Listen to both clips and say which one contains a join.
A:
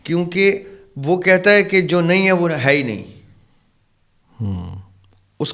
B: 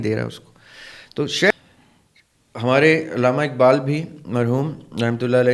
B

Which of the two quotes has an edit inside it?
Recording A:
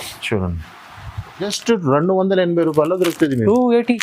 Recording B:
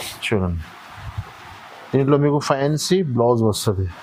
A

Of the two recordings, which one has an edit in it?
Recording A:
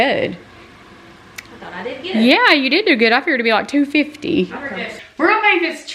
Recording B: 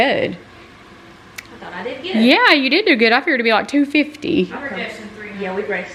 A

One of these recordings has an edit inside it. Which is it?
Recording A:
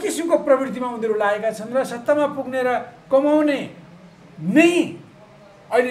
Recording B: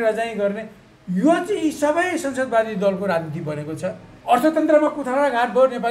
B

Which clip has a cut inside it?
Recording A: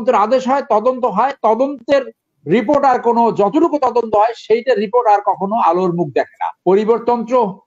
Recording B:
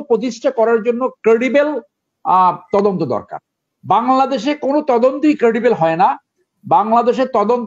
A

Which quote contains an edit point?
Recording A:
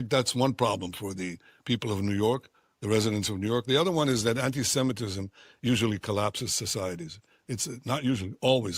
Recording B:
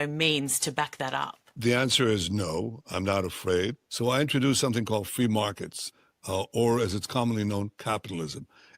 B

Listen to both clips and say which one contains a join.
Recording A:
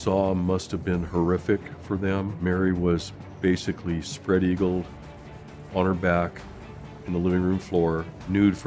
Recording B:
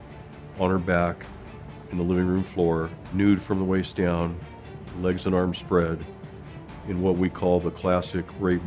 A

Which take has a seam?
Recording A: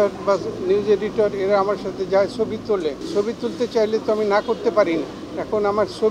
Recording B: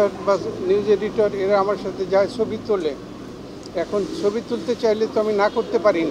A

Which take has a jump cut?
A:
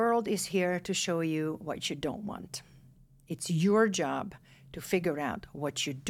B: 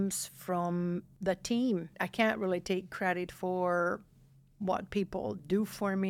B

